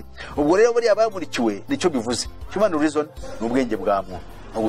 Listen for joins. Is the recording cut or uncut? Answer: cut